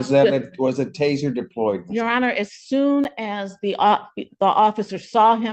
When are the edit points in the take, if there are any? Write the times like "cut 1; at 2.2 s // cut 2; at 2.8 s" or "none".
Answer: none